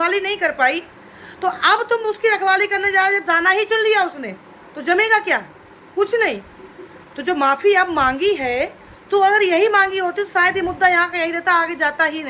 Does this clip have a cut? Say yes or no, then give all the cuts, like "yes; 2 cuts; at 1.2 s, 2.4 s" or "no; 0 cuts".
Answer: no; 0 cuts